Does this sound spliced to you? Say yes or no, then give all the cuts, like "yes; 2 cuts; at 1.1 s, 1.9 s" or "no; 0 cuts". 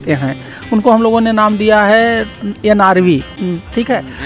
no; 0 cuts